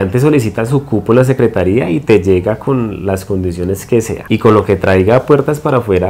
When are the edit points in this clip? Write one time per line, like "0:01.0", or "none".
none